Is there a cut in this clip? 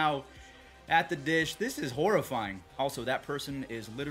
yes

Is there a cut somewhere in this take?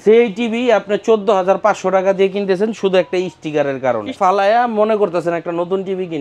yes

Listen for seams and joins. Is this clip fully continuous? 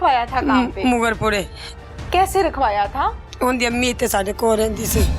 yes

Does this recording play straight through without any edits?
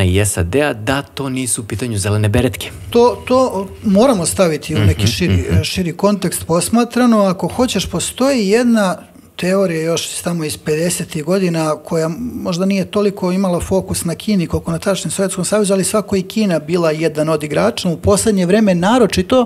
no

